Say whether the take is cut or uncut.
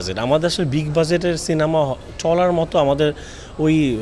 uncut